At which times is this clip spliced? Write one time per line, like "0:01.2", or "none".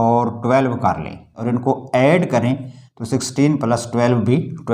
0:01.4